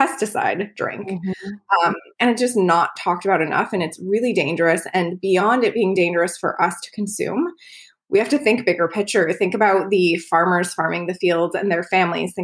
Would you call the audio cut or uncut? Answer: uncut